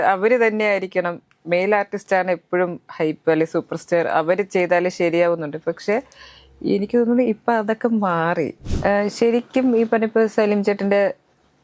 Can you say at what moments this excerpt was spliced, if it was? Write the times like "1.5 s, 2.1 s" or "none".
8.6 s